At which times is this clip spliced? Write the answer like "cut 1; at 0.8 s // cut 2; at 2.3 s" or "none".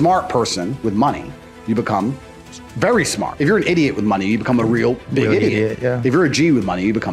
cut 1; at 3.3 s